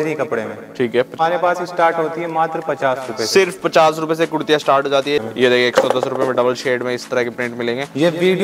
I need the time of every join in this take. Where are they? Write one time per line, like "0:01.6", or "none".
0:01.2
0:05.2